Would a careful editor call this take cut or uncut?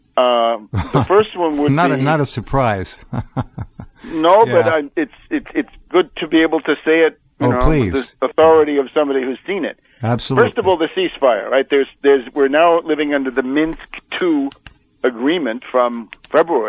uncut